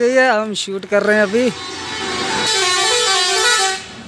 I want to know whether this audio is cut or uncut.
cut